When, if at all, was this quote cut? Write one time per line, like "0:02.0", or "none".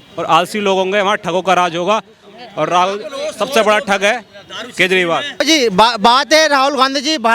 0:05.3